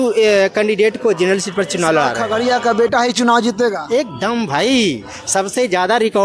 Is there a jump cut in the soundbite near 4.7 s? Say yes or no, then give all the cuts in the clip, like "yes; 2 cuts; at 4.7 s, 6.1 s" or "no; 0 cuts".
no; 1 cut; at 2.2 s